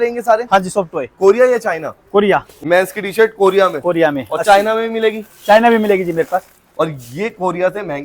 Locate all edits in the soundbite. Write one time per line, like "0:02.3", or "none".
0:02.5
0:06.6